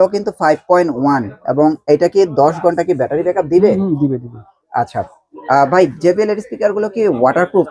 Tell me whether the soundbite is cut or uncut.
uncut